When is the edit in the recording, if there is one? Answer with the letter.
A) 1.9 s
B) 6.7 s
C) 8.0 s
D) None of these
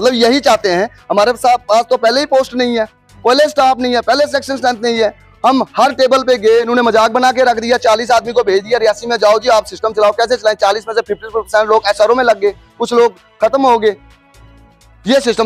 B